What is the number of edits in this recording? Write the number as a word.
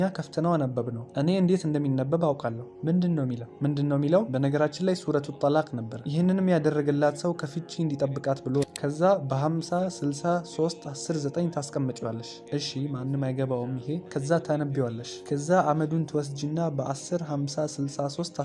one